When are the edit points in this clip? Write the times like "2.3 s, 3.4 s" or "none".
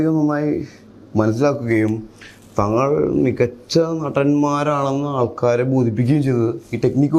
none